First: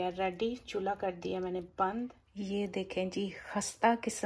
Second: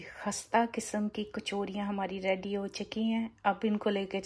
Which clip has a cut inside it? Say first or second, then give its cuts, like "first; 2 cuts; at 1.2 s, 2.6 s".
first; 1 cut; at 2.1 s